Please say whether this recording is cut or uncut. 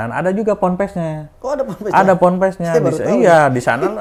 uncut